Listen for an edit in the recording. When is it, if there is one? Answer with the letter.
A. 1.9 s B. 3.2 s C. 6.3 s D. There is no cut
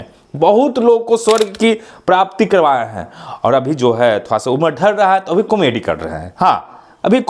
D